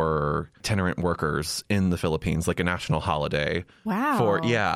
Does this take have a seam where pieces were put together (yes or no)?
no